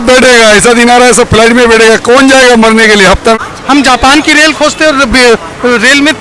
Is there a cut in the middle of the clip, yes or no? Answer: yes